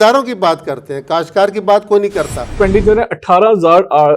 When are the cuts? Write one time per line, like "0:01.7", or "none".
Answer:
0:02.5